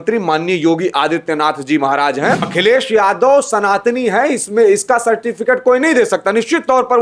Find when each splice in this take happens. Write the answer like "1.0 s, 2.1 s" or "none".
2.5 s